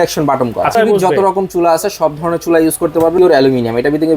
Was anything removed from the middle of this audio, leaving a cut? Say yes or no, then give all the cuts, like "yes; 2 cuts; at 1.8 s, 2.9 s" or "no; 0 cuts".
yes; 2 cuts; at 0.7 s, 3.2 s